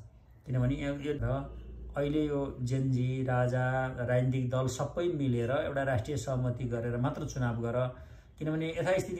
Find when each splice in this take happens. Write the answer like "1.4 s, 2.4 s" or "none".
1.2 s